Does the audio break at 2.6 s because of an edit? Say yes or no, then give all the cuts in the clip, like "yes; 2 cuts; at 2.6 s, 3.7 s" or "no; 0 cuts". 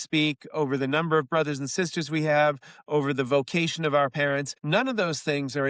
no; 1 cut; at 4.5 s